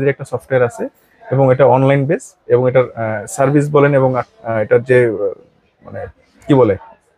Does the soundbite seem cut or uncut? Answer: uncut